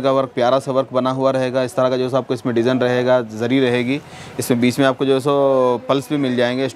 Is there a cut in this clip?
no; 0 cuts

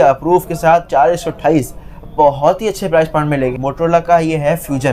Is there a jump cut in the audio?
yes; 1 cut; at 3.5 s

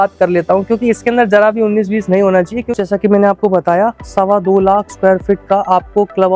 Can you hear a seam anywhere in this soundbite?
yes; 1 cut; at 2.7 s

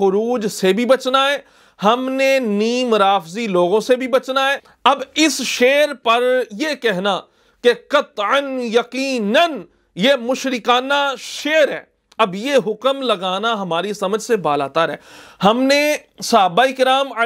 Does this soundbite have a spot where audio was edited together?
yes; 1 cut; at 4.7 s

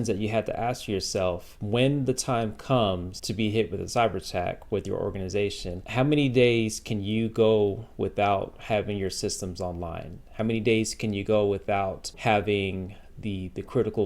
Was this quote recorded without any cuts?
no; 4 cuts; at 1.5 s, 3.2 s, 5.7 s, 12.1 s

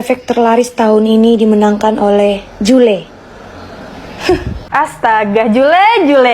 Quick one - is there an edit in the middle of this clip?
yes; 1 cut; at 4.6 s

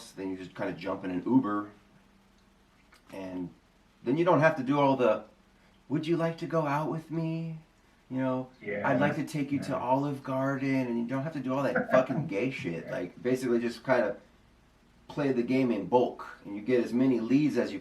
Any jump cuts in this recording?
yes; 1 cut; at 12.8 s

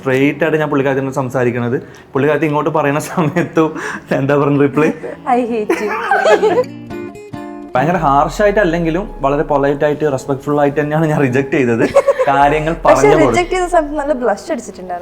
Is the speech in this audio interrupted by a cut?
yes; 1 cut; at 7.3 s

